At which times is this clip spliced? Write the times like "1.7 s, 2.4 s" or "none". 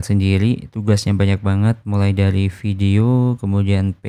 none